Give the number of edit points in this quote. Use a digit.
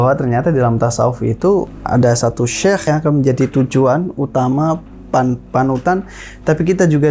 2